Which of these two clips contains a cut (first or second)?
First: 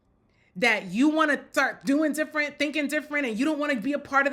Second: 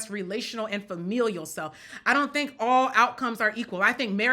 second